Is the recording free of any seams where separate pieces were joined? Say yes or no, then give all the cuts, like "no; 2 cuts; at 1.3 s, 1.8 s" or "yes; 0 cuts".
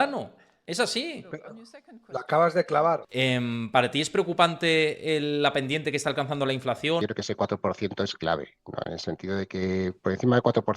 no; 2 cuts; at 3.1 s, 7.0 s